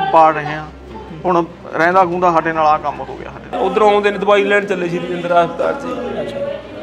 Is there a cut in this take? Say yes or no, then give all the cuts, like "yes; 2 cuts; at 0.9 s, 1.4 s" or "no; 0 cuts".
yes; 1 cut; at 3.6 s